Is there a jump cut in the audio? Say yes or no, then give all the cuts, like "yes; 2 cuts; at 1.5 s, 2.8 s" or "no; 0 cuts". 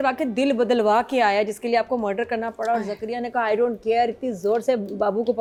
no; 0 cuts